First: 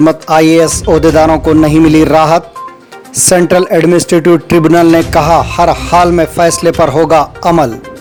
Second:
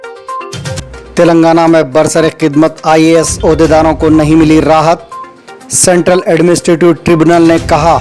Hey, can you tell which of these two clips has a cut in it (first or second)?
second